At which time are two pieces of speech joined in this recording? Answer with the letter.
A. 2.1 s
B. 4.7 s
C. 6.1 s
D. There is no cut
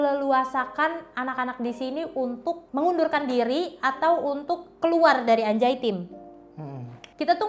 D